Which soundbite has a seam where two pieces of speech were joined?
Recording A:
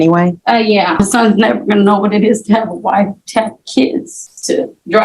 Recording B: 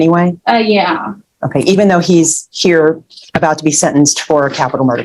A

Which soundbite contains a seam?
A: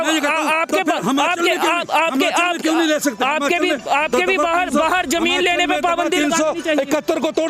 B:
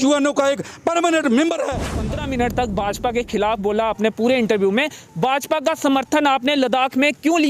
B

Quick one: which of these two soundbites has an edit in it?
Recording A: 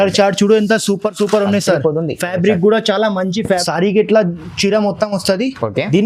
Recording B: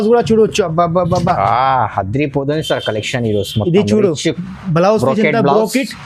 A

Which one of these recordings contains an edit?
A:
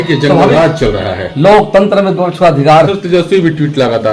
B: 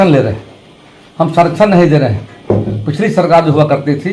A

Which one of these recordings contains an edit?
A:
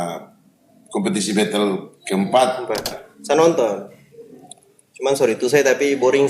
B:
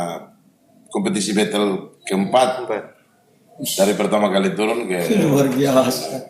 A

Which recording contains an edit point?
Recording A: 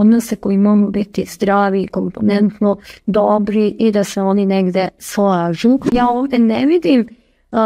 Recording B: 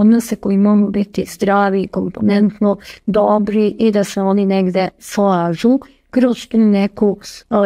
A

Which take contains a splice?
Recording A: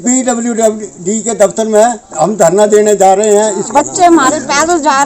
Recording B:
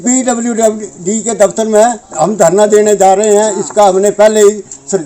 A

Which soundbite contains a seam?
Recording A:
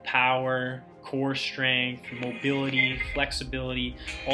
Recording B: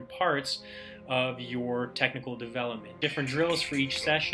B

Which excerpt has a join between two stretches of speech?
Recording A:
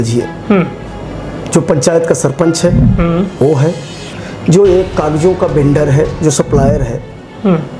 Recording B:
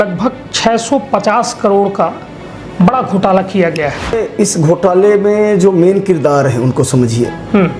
B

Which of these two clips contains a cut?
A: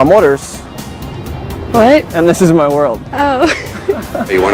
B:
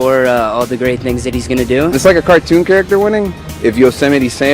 B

